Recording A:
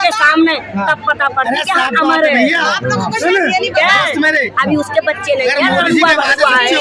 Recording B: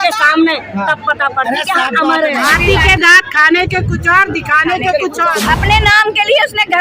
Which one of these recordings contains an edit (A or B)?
B